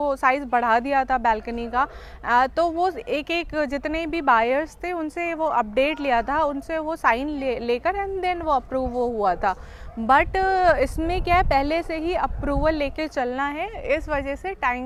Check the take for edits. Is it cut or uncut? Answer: uncut